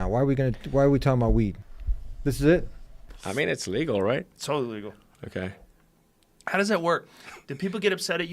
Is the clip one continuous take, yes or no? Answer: no